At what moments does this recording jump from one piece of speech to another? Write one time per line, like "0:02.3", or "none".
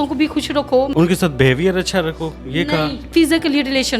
0:00.9